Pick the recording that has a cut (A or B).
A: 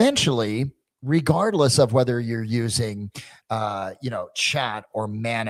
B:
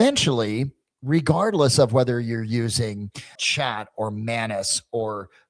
B